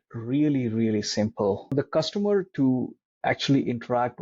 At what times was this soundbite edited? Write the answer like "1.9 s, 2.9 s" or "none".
1.7 s